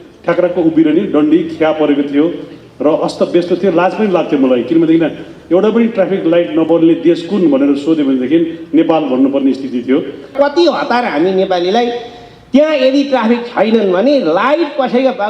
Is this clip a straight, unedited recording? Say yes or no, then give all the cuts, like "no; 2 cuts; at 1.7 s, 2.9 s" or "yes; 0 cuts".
no; 1 cut; at 10.3 s